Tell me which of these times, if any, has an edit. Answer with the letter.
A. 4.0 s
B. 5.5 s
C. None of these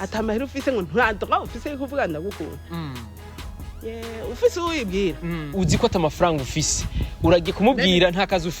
B